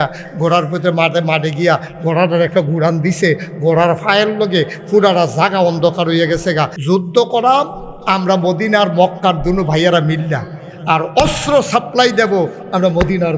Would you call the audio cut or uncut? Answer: cut